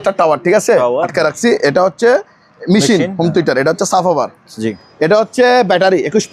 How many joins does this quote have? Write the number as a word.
one